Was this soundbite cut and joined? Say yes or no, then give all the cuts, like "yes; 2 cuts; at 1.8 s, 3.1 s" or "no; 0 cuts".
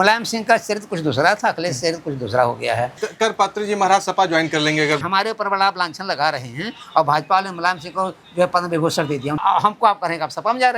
yes; 3 cuts; at 2.9 s, 5.0 s, 9.4 s